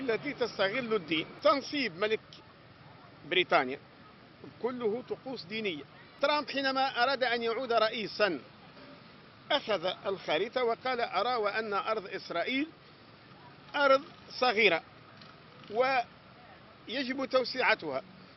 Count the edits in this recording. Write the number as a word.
two